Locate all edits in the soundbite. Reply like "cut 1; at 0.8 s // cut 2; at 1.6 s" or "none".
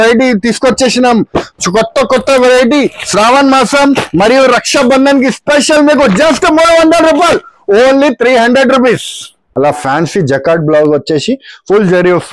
cut 1; at 9.4 s